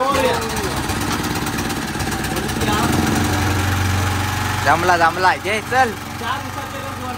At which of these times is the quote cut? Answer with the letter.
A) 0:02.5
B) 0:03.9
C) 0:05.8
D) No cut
D